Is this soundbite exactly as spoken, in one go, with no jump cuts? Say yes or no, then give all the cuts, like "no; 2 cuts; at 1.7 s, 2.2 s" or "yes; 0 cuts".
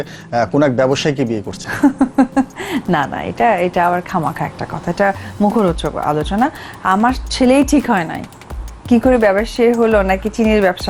yes; 0 cuts